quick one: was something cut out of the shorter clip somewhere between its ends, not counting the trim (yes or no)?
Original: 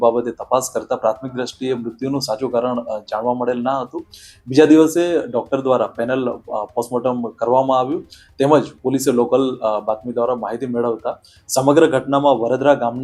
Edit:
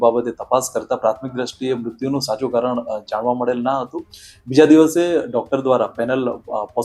no